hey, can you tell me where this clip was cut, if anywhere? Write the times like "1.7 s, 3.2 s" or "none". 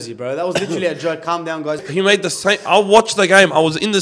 1.8 s